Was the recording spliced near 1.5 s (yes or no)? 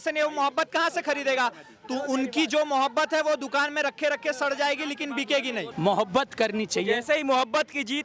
no